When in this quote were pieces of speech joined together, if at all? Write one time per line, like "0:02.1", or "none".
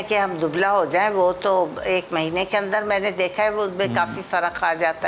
none

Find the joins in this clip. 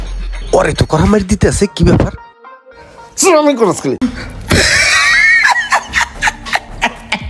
0:04.0

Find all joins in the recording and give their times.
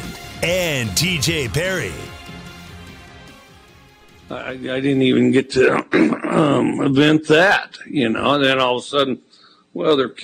0:04.2

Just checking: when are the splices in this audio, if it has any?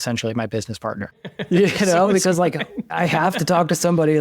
0:01.3
0:02.9

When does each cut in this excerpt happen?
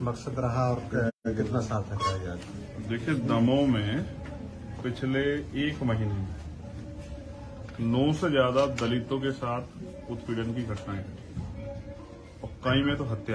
0:01.1

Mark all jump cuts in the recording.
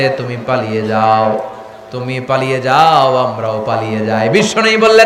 none

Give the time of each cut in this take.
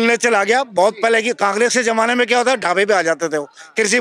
none

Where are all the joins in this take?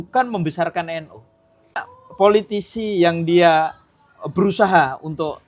0:01.8

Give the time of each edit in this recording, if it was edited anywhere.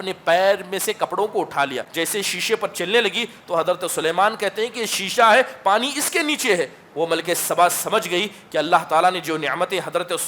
0:01.9

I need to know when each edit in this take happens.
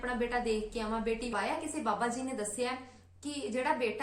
0:01.3

